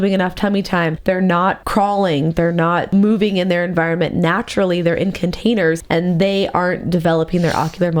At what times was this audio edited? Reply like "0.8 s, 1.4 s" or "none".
1.3 s, 2.9 s, 5.8 s